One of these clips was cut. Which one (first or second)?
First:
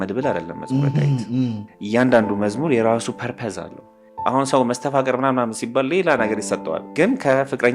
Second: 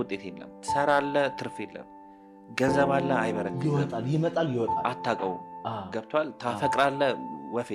first